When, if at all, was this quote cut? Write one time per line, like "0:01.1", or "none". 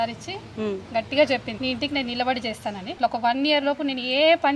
0:01.5
0:03.0

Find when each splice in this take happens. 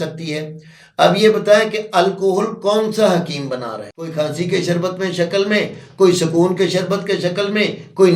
0:04.1

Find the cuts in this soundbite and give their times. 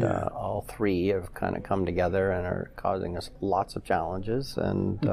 none

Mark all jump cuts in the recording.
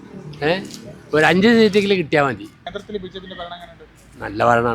0:02.6

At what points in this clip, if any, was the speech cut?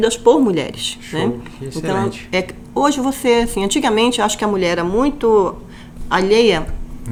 none

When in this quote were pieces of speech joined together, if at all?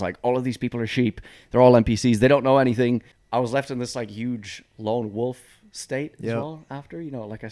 0:03.1

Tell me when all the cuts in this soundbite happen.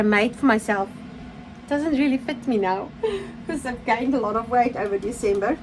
none

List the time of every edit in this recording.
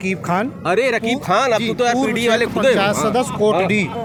none

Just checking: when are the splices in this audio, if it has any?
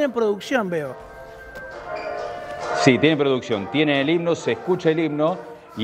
none

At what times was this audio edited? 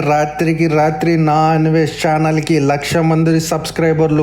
none

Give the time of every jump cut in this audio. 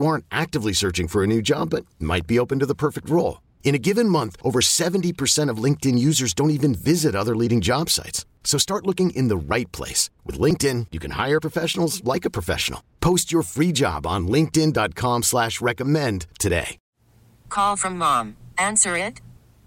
0:16.8

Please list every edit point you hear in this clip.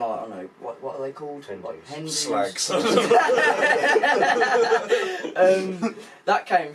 none

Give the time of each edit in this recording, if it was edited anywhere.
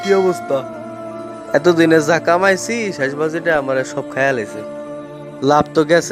none

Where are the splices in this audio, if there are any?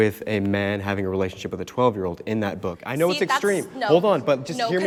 none

